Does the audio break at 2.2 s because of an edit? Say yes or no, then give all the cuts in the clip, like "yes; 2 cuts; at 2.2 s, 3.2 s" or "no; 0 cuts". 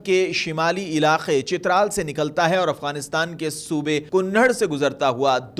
no; 1 cut; at 4.1 s